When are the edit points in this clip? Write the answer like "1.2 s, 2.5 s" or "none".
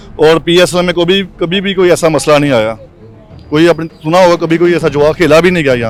none